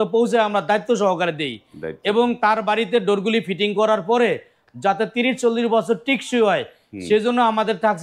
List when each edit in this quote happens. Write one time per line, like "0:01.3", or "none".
none